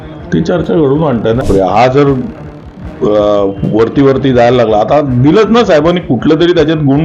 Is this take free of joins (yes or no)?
no